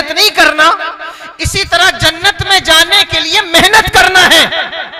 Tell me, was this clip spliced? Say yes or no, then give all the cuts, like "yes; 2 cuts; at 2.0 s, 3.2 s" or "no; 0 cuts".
no; 0 cuts